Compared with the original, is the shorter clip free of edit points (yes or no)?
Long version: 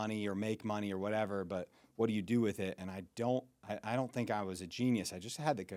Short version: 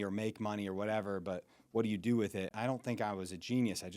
no